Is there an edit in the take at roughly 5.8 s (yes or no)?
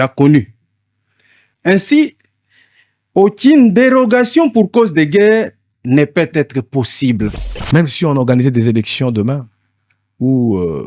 no